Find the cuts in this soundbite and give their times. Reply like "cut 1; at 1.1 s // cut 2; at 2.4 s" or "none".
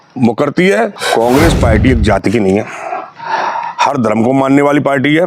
cut 1; at 1.0 s